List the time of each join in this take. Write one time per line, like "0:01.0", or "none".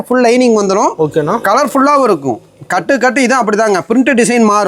none